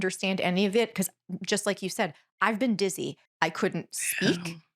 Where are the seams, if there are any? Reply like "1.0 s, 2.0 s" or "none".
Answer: 3.3 s